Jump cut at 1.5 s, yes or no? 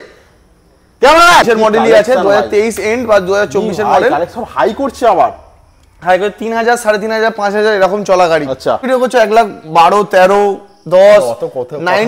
yes